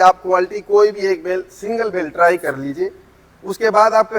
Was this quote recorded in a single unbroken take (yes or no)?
yes